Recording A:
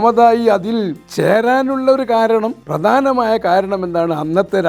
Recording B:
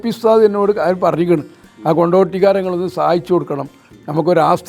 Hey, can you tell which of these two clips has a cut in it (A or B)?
A